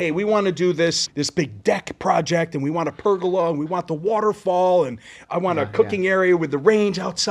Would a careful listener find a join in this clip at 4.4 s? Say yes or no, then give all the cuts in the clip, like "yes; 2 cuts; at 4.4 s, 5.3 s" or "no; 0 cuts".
no; 1 cut; at 1.0 s